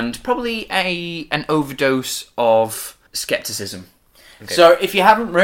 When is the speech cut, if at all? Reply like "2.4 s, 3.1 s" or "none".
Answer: 3.1 s